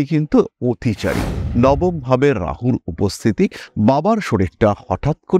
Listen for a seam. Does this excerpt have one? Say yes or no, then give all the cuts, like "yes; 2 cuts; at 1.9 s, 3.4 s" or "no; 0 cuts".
yes; 1 cut; at 1.4 s